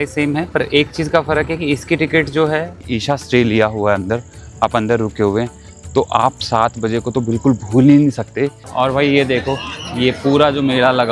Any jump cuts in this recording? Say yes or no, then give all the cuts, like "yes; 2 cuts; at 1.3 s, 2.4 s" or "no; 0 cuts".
yes; 2 cuts; at 2.9 s, 8.6 s